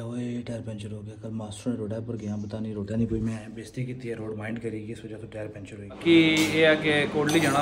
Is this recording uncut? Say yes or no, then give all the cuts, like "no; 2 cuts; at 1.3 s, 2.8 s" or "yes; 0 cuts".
no; 1 cut; at 6.0 s